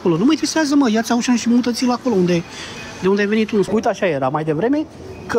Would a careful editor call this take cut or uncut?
cut